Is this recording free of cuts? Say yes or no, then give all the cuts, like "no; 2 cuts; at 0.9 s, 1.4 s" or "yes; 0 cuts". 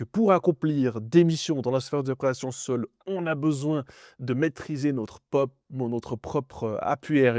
yes; 0 cuts